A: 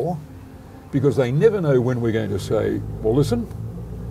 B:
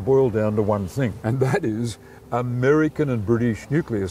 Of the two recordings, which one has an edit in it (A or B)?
B